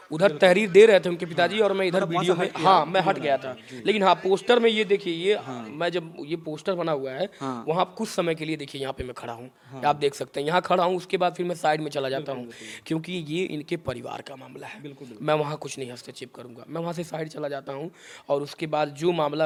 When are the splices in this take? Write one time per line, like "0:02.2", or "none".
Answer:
none